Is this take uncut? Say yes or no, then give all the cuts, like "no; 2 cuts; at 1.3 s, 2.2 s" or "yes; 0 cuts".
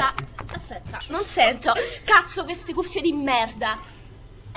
yes; 0 cuts